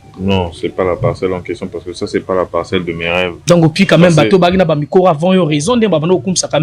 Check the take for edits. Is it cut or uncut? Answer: cut